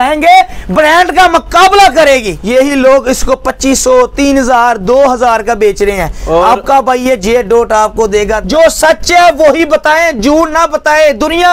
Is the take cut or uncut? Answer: cut